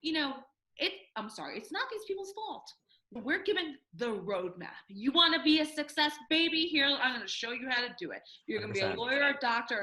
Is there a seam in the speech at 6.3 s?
no; 1 cut; at 3.1 s

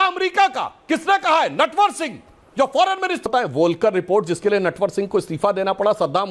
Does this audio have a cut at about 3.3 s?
yes; 1 cut; at 3.3 s

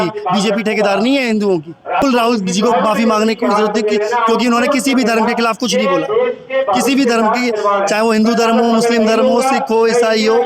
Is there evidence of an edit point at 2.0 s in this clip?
yes; 1 cut; at 2.0 s

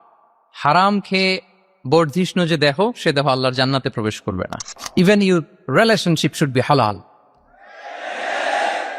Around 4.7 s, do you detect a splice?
yes; 1 cut; at 4.7 s

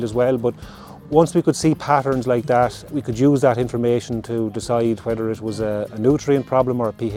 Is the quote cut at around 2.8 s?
yes; 1 cut; at 2.8 s

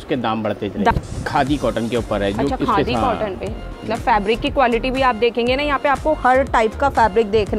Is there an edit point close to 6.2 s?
no; 2 cuts; at 0.9 s, 3.7 s

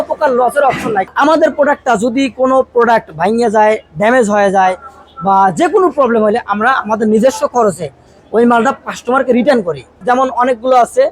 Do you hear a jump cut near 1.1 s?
yes; 2 cuts; at 1.1 s, 10.0 s

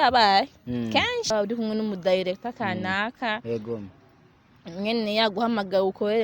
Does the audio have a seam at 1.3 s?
yes; 1 cut; at 1.3 s

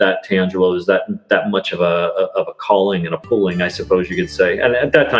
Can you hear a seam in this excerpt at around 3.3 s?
no; 0 cuts

